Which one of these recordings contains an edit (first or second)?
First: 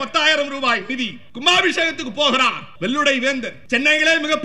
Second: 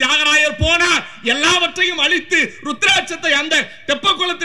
first